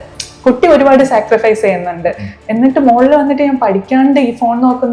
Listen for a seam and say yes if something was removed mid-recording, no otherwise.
no